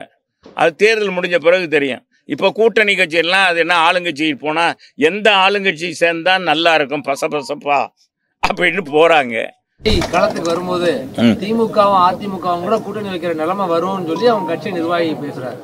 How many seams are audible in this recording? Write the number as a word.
one